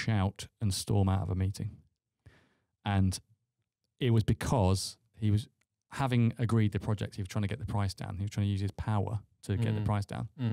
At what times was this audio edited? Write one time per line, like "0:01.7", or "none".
none